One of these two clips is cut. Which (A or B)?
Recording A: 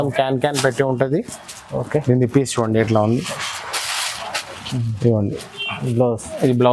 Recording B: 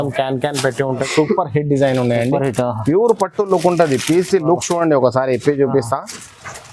B